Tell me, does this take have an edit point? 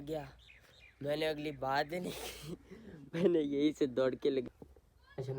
yes; 1 cut; at 4.4 s

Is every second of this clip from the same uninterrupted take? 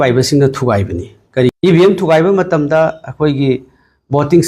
no; 1 cut; at 1.5 s

